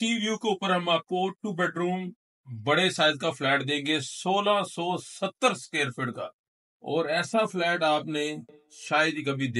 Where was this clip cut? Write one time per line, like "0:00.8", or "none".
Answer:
none